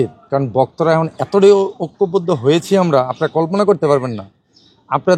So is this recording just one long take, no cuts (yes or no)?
yes